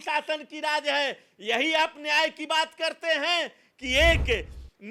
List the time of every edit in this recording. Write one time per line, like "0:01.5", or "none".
none